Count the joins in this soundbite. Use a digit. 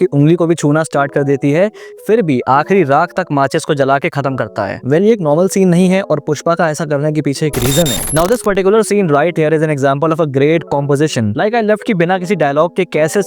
1